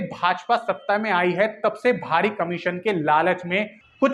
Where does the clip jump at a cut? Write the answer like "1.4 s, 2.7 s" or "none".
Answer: none

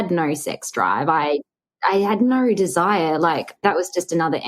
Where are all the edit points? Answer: 3.6 s

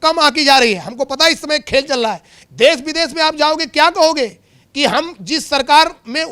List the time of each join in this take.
2.3 s

